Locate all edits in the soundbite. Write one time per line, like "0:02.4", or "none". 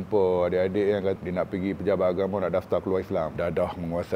0:01.2